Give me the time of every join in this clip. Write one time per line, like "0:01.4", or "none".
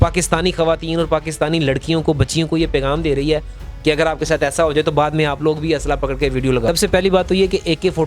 0:06.7